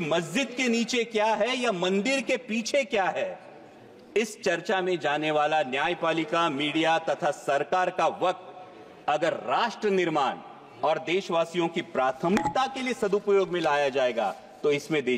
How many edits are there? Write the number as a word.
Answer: zero